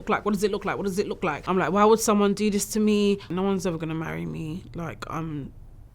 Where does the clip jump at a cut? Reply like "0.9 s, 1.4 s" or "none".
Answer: 1.4 s, 3.3 s